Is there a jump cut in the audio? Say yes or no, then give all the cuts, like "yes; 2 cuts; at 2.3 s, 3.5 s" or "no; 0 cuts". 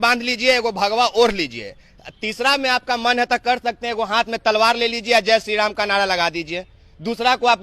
no; 0 cuts